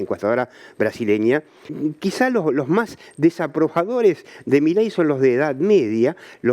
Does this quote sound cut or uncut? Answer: cut